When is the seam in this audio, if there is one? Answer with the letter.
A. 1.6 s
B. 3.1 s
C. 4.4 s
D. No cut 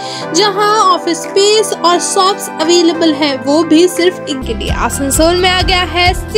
C